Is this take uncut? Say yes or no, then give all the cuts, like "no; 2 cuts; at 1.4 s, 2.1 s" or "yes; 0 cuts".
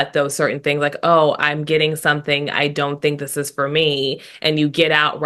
yes; 0 cuts